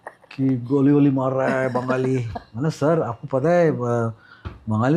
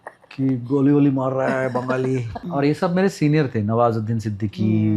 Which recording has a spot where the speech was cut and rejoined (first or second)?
second